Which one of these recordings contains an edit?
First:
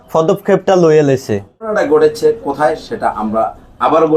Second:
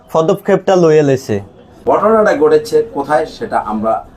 first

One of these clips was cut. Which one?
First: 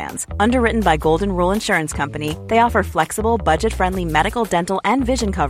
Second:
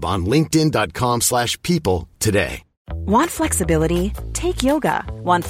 second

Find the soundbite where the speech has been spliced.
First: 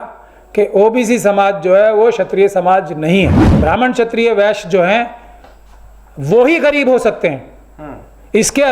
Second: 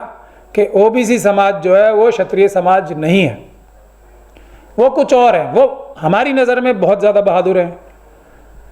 first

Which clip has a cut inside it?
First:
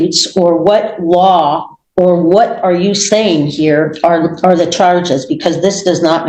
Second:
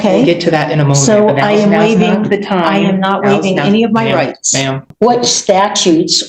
second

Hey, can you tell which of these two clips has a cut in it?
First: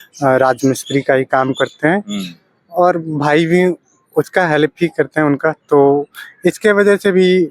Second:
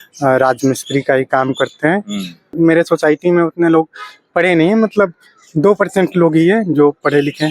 second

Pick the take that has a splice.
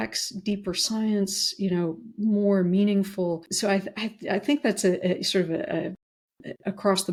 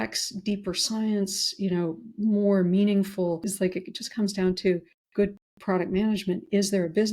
second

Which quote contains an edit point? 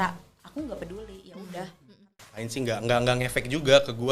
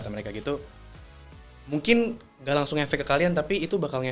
first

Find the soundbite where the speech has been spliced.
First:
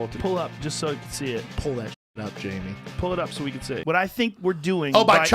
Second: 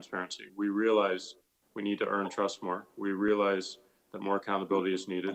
first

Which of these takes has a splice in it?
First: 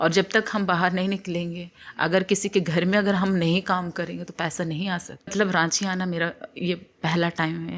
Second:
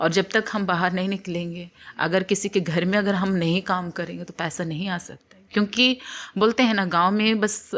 first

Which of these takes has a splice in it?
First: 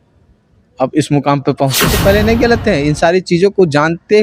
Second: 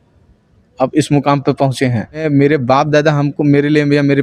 first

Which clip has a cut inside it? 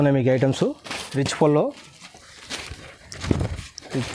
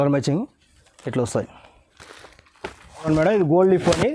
second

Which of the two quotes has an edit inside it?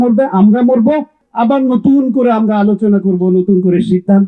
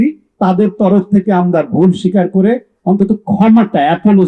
first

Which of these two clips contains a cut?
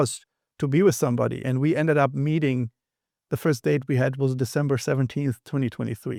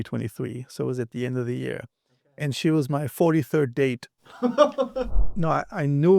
second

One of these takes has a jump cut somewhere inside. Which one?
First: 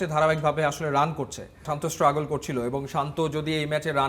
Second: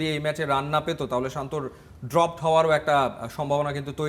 first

